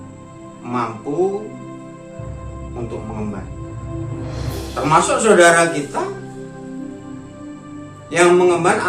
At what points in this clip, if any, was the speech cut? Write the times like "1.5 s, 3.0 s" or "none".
6.2 s, 8.1 s